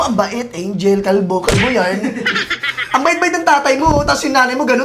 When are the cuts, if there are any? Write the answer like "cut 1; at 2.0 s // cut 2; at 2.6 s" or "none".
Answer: none